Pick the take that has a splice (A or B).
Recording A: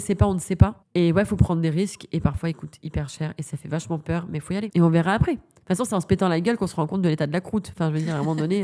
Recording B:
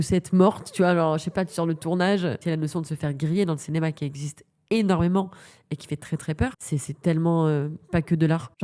B